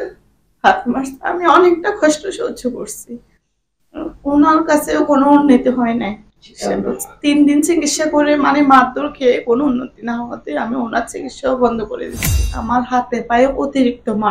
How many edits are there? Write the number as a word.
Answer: one